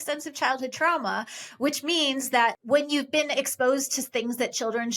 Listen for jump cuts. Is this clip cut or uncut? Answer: cut